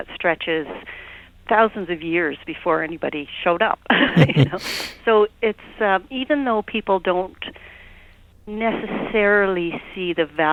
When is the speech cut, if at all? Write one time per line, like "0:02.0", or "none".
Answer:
none